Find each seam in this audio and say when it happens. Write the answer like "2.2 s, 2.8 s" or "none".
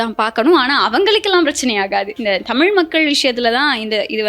2.1 s